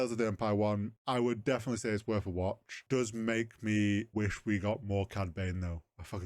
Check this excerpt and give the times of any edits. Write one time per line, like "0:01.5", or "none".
0:00.9
0:02.8
0:04.1